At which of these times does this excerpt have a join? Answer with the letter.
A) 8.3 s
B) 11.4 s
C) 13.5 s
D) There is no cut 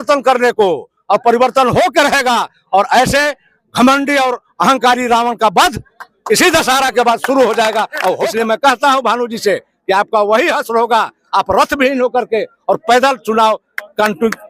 A